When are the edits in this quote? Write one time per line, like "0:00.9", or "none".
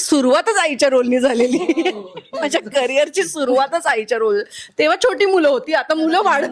none